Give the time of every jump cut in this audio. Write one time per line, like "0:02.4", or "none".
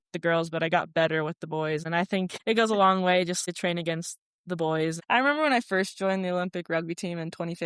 0:02.2
0:03.4
0:05.0